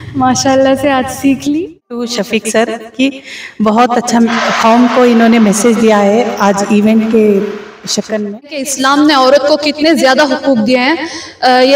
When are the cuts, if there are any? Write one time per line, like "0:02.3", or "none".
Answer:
0:02.1
0:08.7

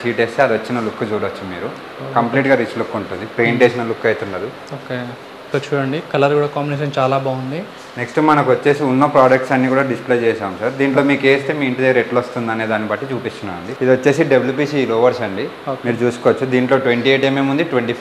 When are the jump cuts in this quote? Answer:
none

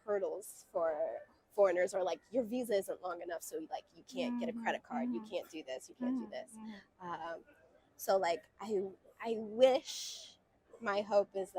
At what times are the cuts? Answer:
none

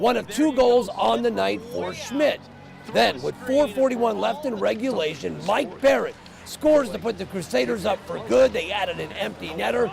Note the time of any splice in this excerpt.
0:04.8

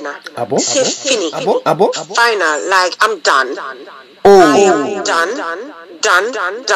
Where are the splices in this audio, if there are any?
0:02.0

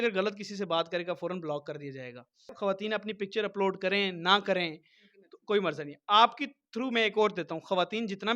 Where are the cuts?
0:02.5

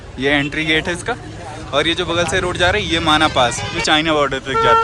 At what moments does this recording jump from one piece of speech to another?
0:03.7

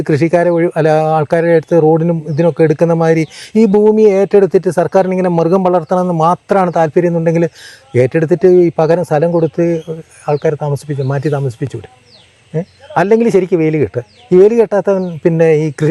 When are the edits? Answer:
none

